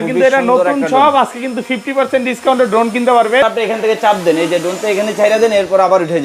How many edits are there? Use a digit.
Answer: 1